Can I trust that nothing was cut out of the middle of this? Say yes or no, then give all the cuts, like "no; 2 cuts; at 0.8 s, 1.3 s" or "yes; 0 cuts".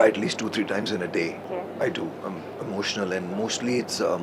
no; 1 cut; at 1.4 s